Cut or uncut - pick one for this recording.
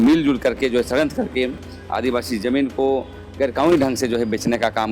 uncut